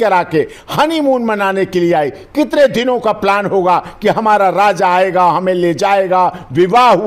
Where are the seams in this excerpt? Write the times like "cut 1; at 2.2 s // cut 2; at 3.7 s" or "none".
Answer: none